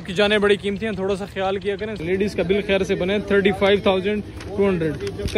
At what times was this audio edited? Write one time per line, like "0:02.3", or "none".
0:02.0